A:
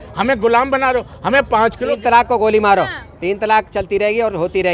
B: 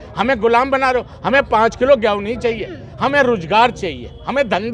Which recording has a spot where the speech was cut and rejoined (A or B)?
A